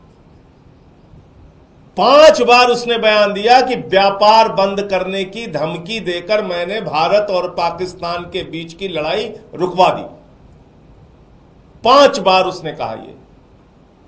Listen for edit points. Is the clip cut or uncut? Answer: uncut